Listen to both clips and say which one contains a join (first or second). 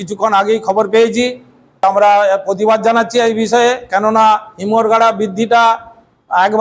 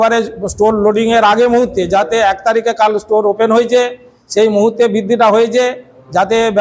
first